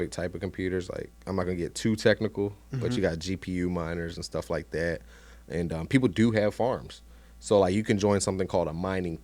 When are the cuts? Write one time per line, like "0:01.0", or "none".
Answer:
none